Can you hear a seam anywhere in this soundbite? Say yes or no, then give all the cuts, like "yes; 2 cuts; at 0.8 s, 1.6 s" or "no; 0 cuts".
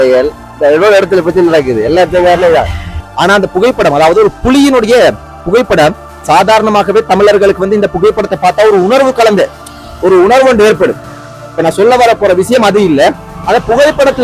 yes; 1 cut; at 3.0 s